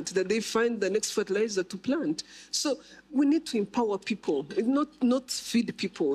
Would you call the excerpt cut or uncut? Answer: cut